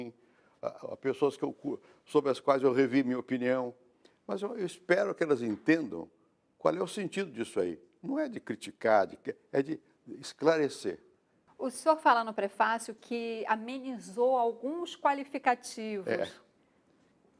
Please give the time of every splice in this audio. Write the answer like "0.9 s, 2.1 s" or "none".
7.2 s